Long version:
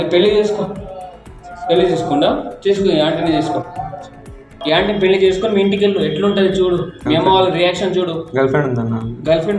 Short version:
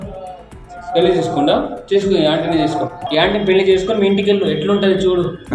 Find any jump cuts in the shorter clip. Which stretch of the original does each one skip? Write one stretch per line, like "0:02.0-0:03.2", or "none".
0:03.7-0:04.5